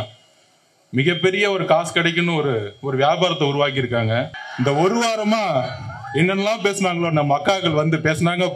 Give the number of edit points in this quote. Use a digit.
1